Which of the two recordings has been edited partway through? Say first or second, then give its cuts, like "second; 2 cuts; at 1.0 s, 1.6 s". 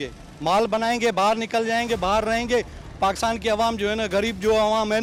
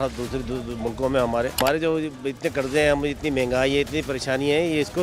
second; 1 cut; at 1.6 s